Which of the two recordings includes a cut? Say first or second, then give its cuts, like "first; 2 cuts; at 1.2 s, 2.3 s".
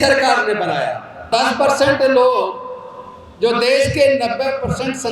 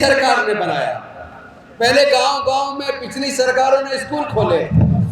first; 1 cut; at 1.3 s